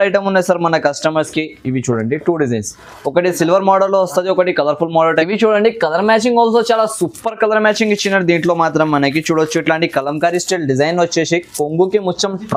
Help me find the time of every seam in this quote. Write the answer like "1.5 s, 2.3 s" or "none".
none